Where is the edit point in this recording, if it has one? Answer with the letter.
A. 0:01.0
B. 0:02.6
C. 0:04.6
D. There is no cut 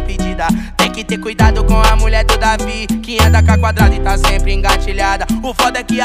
A